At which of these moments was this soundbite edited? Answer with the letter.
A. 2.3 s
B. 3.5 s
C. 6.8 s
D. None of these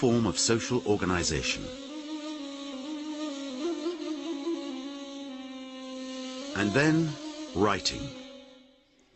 B